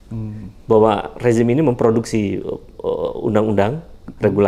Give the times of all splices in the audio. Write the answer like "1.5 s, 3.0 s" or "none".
none